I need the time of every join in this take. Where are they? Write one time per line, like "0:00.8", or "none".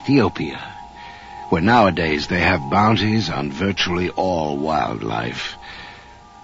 none